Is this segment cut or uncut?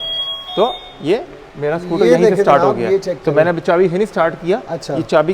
uncut